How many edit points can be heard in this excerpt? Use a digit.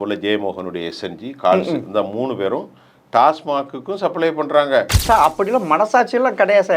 1